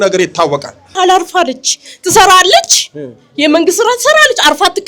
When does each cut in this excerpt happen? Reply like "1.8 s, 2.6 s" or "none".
0.9 s